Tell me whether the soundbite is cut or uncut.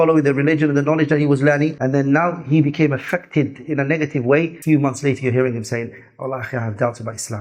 cut